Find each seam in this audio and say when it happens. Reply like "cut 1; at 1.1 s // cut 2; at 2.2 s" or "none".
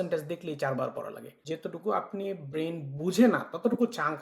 cut 1; at 1.4 s